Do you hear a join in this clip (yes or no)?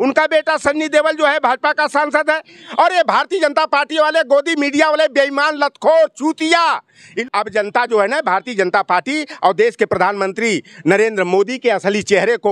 yes